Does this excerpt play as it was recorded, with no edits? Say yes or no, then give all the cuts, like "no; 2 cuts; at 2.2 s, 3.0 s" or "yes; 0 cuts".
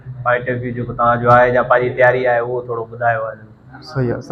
yes; 0 cuts